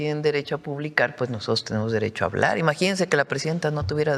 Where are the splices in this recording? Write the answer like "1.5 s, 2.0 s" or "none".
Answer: none